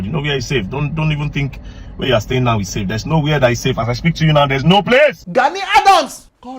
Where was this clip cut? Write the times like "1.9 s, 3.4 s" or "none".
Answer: 5.2 s